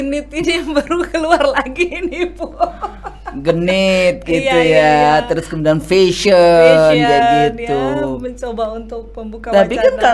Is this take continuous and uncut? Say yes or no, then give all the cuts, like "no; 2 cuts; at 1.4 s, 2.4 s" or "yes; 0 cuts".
yes; 0 cuts